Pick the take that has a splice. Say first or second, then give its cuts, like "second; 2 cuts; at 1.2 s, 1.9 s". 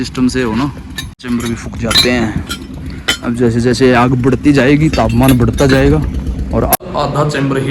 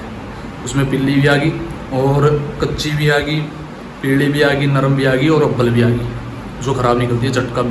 first; 2 cuts; at 1.2 s, 6.8 s